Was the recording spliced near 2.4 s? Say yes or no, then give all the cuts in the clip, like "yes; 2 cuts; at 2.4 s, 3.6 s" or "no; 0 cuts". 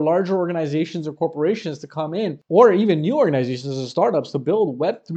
no; 0 cuts